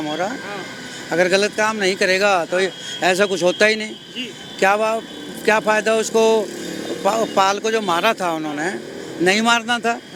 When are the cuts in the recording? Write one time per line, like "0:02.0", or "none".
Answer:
none